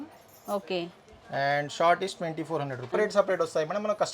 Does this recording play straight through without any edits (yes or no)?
no